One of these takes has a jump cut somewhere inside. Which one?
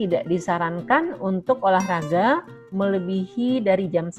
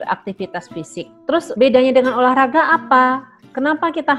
second; 1 cut; at 1.5 s

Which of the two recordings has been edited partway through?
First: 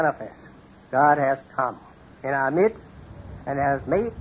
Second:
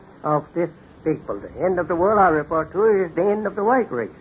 second; 1 cut; at 2.7 s

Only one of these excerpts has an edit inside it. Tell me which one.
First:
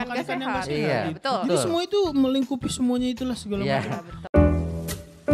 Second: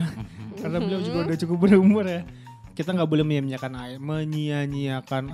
first; 1 cut; at 4.3 s

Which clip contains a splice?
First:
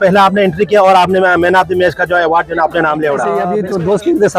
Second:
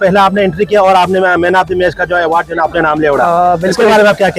first; 1 cut; at 3.5 s

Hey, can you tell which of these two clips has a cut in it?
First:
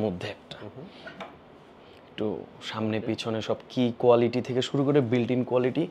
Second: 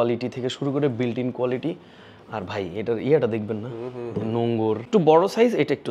second; 1 cut; at 4.8 s

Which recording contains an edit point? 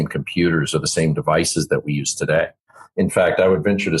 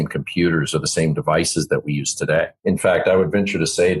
second; 1 cut; at 2.5 s

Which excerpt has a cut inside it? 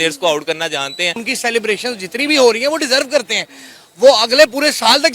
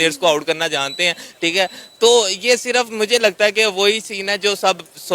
first; 1 cut; at 1.3 s

